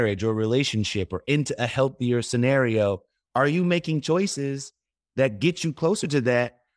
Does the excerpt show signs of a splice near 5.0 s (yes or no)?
no